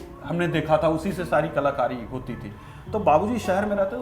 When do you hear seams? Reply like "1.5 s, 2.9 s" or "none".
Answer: none